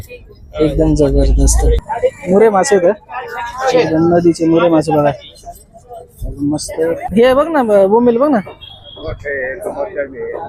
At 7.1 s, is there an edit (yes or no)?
yes